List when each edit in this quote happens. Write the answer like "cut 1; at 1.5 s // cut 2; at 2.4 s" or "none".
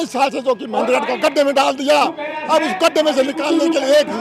none